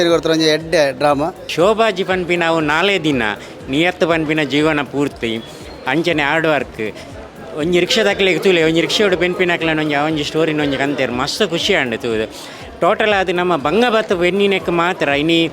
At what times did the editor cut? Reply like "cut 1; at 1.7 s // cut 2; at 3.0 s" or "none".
cut 1; at 1.4 s

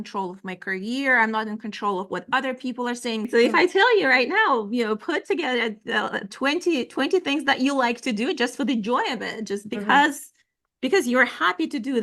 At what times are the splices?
cut 1; at 3.3 s

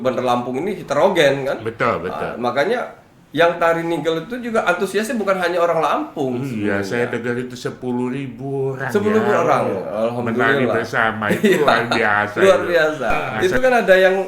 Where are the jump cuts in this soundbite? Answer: cut 1; at 13.3 s

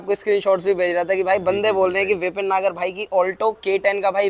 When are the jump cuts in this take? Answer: none

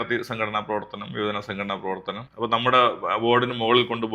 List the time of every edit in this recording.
cut 1; at 2.2 s

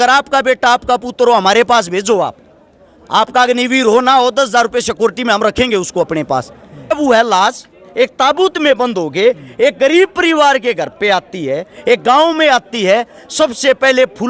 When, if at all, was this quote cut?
cut 1; at 6.9 s

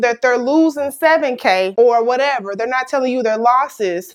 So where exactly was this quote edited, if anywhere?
none

